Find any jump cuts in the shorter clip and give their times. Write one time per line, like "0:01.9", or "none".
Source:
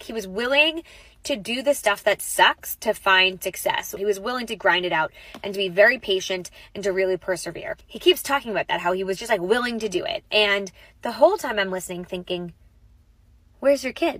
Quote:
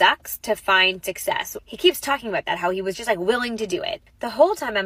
0:01.5
0:04.0